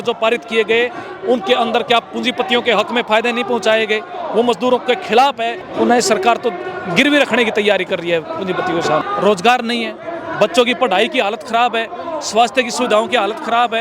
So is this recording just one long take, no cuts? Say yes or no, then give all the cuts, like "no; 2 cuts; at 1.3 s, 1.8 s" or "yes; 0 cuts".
no; 2 cuts; at 5.6 s, 9.0 s